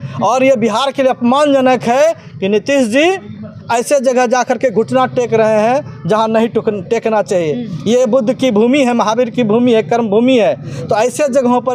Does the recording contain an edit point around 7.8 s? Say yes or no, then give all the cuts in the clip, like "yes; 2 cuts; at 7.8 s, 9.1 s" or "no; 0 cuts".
no; 0 cuts